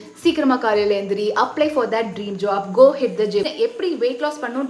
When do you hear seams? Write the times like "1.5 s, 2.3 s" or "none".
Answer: 3.5 s